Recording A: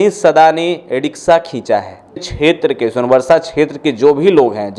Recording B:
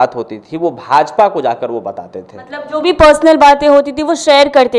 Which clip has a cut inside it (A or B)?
A